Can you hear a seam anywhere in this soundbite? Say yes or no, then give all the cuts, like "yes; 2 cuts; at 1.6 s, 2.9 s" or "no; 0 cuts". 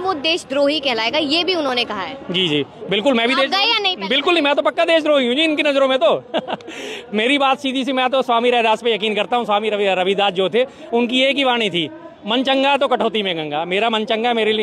no; 0 cuts